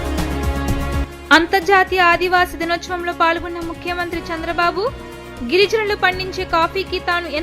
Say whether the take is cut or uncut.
cut